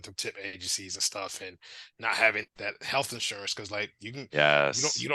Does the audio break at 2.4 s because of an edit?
yes; 1 cut; at 2.4 s

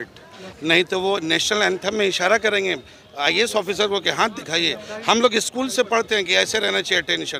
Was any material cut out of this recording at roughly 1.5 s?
no; 0 cuts

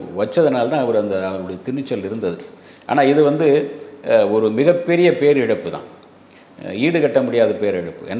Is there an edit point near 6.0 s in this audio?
no; 0 cuts

